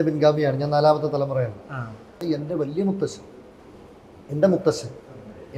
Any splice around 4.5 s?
no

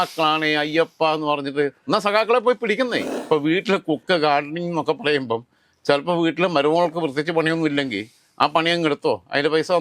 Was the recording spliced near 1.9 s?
no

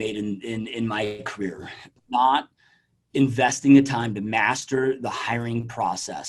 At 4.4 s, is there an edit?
no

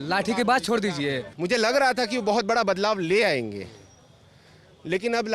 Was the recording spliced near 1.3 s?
yes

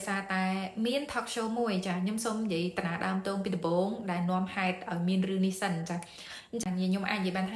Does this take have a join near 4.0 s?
no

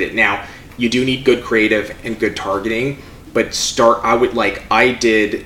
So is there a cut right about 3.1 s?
no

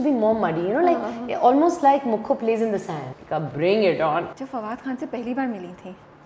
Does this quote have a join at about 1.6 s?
no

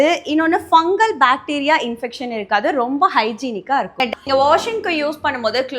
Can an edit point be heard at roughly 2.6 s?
no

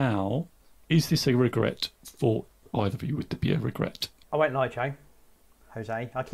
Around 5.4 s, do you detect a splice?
no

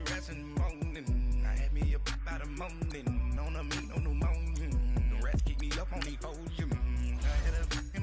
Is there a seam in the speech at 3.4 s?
yes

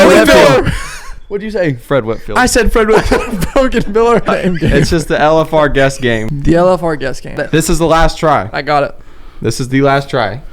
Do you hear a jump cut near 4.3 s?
yes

